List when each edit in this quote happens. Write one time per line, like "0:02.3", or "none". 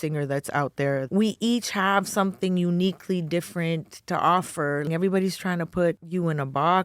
0:01.0
0:04.9
0:06.0